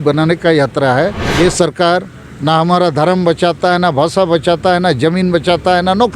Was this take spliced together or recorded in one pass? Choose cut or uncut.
cut